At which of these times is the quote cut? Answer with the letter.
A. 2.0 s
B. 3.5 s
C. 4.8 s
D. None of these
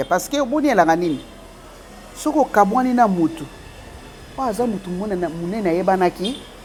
D